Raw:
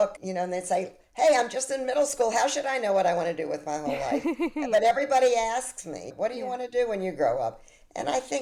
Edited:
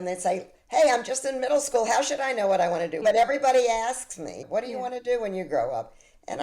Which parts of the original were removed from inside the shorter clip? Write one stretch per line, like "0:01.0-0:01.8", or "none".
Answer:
0:03.4-0:04.7